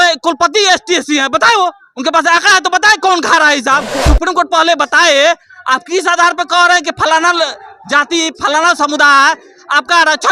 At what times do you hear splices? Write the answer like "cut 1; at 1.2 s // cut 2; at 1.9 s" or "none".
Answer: cut 1; at 4.1 s